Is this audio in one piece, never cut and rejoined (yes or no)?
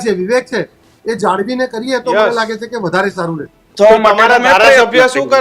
no